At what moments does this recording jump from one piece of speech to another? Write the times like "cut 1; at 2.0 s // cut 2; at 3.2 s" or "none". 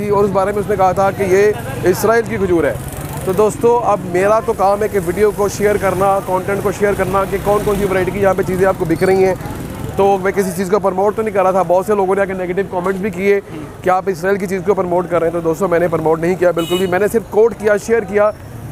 none